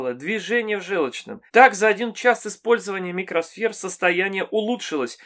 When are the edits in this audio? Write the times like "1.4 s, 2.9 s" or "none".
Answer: 1.4 s